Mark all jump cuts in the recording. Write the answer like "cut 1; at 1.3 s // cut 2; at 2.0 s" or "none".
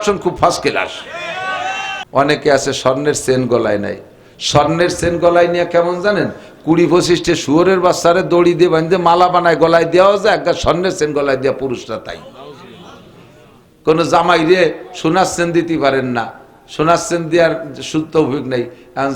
cut 1; at 2.0 s